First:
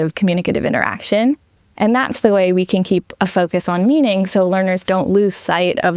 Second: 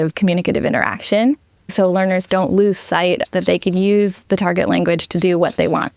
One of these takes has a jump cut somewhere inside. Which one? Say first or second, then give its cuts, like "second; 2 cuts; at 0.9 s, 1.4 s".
second; 2 cuts; at 1.7 s, 3.2 s